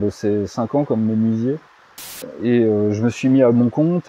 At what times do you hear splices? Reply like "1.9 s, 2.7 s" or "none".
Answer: 2.2 s